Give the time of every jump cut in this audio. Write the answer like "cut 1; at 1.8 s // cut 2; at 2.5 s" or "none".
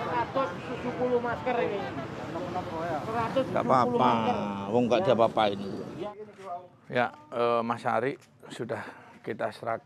cut 1; at 6.1 s